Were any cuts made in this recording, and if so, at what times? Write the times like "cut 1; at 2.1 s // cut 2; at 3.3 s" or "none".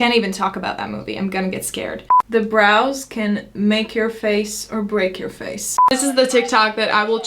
cut 1; at 2.0 s // cut 2; at 5.9 s